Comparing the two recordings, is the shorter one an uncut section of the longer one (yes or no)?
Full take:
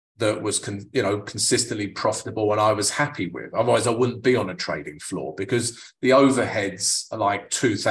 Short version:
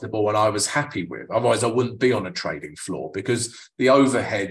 yes